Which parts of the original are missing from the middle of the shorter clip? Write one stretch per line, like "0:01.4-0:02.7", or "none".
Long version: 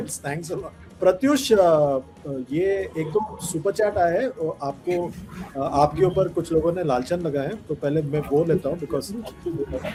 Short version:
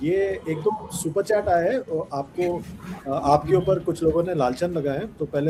none